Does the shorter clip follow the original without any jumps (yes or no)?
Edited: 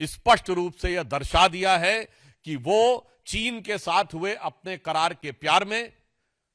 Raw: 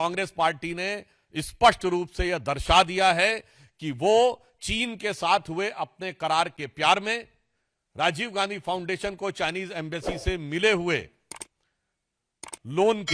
yes